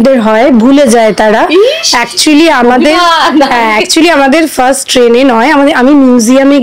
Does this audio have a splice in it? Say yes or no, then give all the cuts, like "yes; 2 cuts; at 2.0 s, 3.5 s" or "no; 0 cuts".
no; 0 cuts